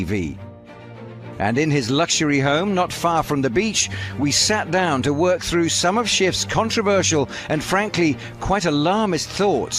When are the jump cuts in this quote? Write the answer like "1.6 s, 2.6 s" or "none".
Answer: none